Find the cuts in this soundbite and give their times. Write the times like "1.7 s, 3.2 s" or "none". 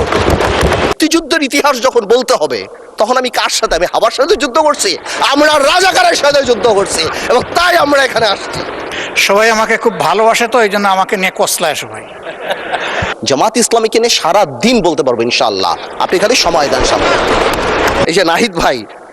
0.9 s, 8.9 s, 13.1 s, 18.1 s